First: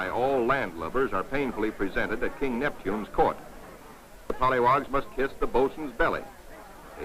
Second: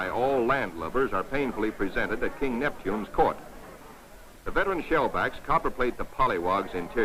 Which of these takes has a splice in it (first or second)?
first